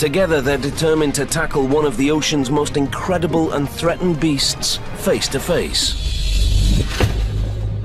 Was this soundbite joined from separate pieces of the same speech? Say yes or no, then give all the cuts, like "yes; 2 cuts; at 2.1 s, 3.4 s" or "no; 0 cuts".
yes; 1 cut; at 3.8 s